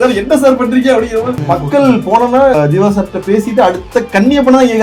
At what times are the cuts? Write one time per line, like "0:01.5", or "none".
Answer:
0:01.3
0:02.6